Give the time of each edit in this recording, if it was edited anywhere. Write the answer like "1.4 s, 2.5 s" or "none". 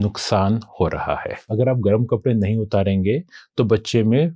1.4 s